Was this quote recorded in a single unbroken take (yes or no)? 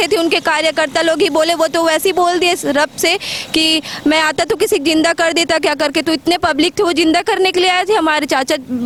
yes